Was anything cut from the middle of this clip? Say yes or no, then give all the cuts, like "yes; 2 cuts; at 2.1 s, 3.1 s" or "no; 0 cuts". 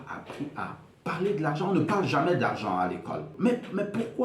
yes; 1 cut; at 3.3 s